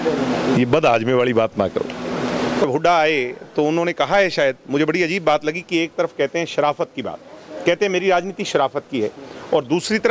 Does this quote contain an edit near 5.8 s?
no; 1 cut; at 2.6 s

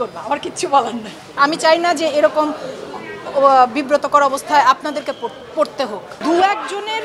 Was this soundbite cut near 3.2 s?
no; 2 cuts; at 1.4 s, 6.2 s

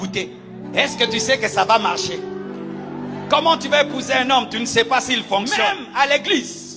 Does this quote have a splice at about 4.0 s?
no; 1 cut; at 5.8 s

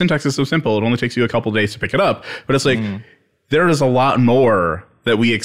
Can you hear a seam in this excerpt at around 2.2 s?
no; 0 cuts

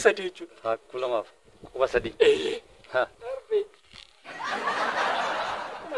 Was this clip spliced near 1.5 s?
no; 1 cut; at 3.1 s

